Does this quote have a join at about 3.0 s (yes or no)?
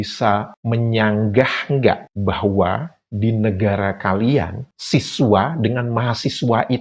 no